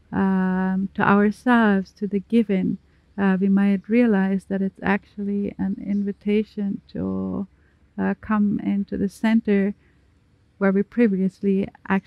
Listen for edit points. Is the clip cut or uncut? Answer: uncut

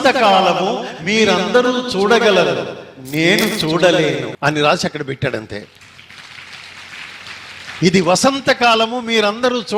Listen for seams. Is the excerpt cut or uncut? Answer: cut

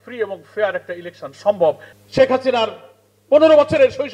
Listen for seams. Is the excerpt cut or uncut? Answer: cut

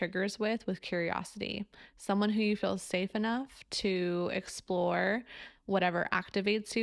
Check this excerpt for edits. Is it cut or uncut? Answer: uncut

